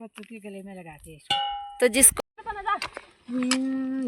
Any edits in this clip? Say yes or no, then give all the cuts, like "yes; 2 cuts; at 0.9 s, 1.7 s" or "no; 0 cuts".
yes; 1 cut; at 2.1 s